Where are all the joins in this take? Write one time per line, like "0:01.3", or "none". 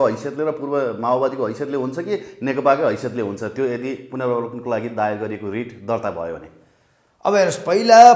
none